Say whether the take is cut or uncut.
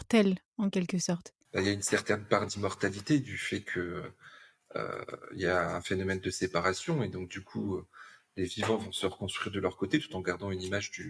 uncut